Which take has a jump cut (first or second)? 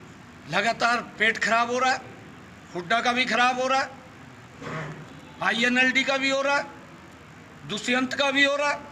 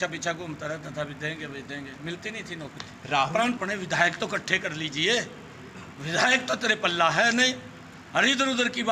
second